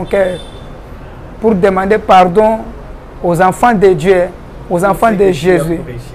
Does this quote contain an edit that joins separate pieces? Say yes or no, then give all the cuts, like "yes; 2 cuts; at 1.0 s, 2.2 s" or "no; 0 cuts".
no; 0 cuts